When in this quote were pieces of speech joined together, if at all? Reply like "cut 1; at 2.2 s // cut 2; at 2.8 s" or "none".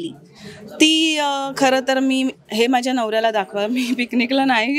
none